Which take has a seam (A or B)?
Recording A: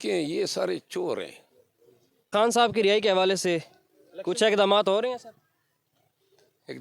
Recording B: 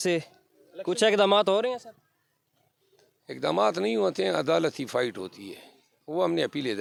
A